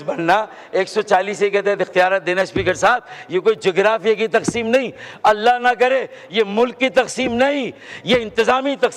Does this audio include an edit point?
no; 0 cuts

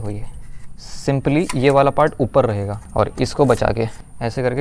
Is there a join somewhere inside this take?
no; 0 cuts

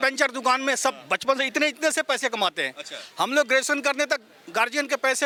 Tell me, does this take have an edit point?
no; 0 cuts

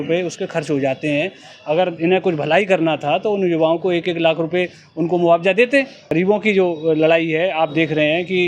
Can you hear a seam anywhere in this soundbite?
yes; 1 cut; at 6.1 s

